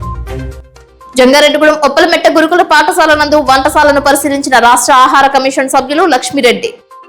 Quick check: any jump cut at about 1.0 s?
yes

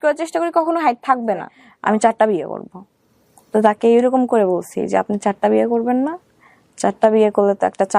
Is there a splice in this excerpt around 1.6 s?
yes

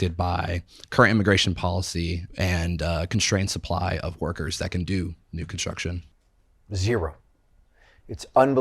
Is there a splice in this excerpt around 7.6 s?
no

